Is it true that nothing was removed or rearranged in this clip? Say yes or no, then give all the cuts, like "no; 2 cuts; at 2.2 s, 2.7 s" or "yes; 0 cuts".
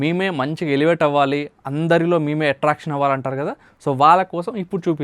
yes; 0 cuts